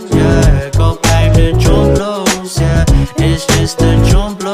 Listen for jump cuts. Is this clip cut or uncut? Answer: cut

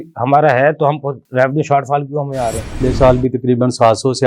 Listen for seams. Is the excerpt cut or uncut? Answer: cut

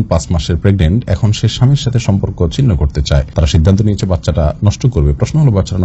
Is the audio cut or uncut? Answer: uncut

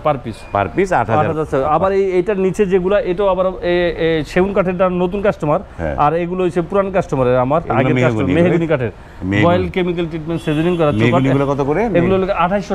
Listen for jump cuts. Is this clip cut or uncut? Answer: uncut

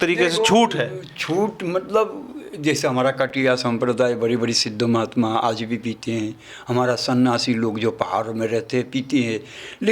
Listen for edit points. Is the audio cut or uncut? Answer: uncut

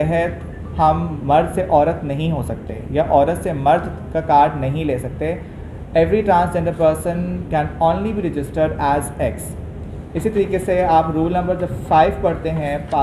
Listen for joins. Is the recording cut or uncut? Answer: uncut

